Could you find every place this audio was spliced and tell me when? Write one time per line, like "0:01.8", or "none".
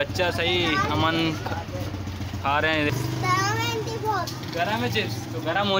0:02.9
0:04.6